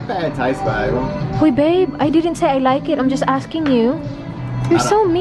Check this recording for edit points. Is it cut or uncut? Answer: uncut